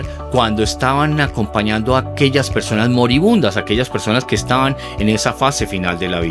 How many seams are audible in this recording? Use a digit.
0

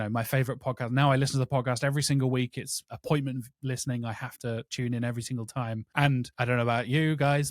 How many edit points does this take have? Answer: 2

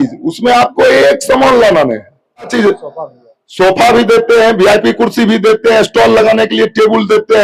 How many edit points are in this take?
1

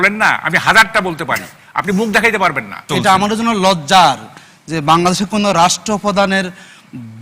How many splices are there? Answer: 1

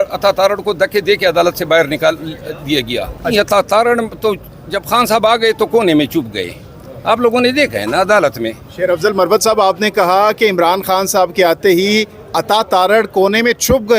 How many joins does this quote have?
2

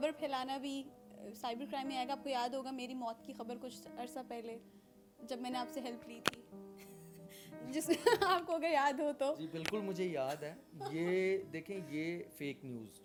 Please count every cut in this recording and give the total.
0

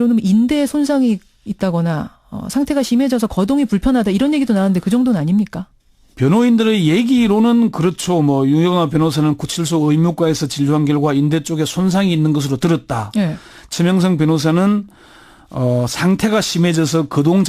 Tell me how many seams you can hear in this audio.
1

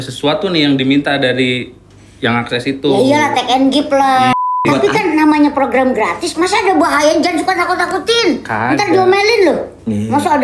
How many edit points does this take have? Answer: 1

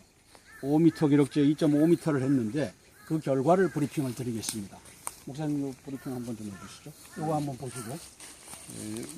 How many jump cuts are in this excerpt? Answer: 1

